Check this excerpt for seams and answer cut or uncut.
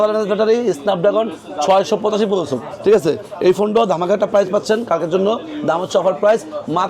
uncut